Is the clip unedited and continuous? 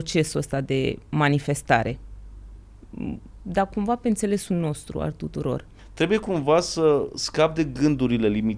no; 1 cut; at 5.8 s

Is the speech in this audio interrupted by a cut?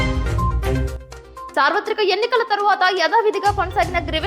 yes; 1 cut; at 1.0 s

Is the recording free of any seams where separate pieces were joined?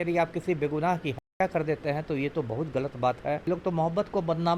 no; 1 cut; at 3.4 s

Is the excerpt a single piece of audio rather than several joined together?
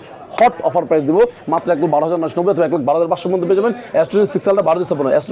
yes; 0 cuts

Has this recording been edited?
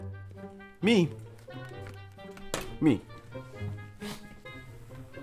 no; 0 cuts

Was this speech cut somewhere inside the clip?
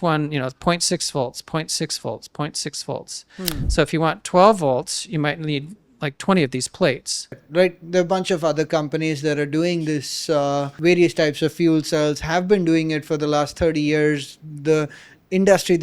yes; 2 cuts; at 7.4 s, 10.7 s

